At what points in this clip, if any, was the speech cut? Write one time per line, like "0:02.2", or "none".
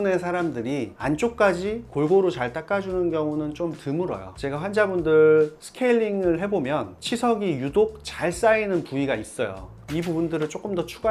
0:01.0
0:04.2
0:09.8